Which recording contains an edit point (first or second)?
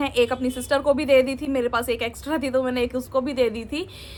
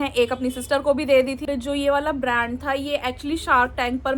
second